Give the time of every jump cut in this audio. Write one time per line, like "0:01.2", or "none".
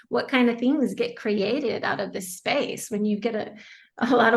none